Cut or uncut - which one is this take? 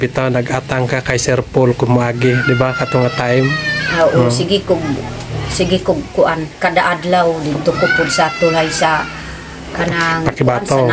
uncut